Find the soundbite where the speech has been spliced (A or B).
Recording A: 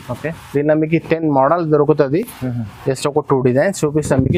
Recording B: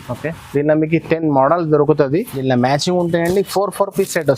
B